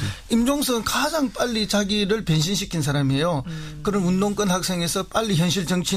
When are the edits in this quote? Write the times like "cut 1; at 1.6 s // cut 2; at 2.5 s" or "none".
cut 1; at 1.2 s